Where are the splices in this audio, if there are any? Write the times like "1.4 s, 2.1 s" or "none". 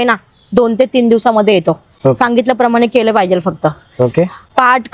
none